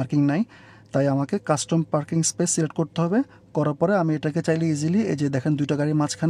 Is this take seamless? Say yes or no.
yes